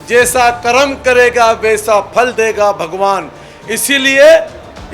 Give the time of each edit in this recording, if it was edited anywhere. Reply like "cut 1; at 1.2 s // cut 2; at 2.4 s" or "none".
none